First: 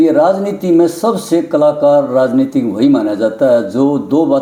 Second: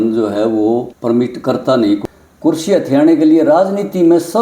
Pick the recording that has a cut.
second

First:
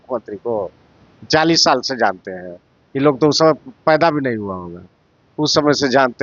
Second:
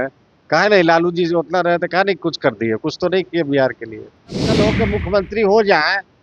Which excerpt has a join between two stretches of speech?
second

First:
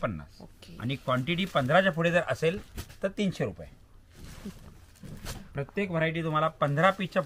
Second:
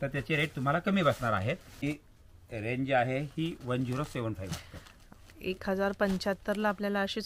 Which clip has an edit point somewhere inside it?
second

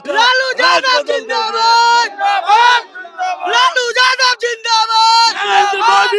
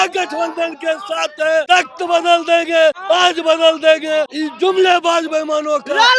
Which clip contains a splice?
second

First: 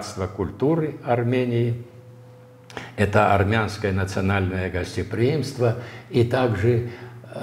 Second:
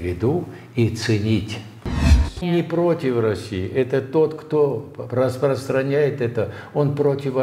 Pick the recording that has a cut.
second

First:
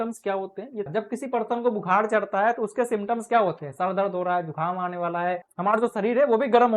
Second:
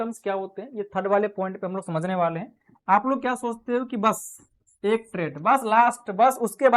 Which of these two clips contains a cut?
first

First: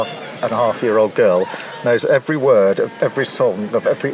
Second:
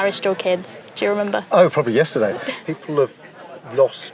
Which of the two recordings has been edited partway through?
second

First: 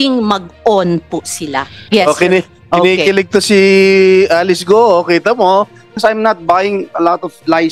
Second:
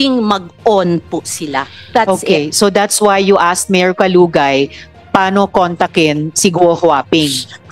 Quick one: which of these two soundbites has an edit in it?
first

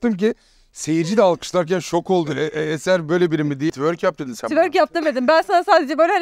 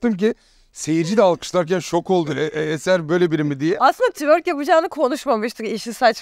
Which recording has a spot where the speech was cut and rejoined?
first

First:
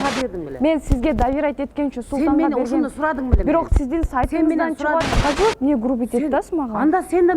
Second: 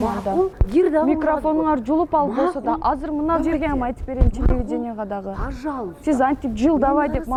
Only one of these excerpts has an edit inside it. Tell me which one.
first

